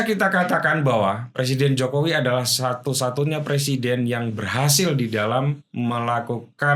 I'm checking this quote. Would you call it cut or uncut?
uncut